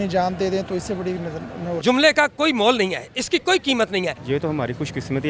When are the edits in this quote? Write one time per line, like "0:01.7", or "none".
0:01.8
0:04.2

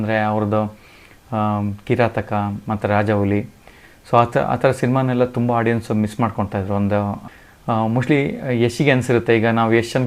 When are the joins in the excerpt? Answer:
none

